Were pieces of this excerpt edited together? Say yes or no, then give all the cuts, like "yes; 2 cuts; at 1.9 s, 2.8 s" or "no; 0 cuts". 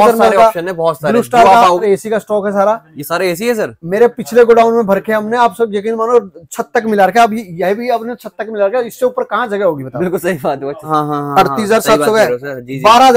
yes; 2 cuts; at 1.8 s, 10.9 s